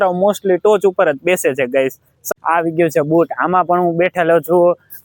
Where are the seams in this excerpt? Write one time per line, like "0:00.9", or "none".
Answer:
0:02.1